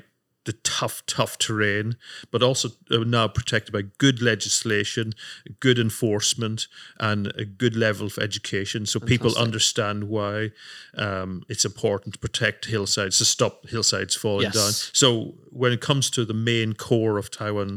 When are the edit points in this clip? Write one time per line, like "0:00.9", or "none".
none